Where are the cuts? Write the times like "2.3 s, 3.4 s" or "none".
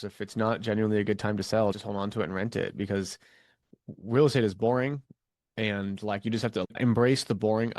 6.6 s